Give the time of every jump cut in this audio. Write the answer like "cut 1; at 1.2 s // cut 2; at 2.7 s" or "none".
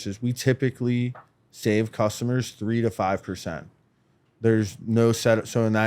none